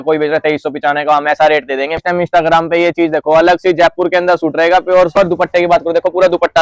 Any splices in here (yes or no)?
yes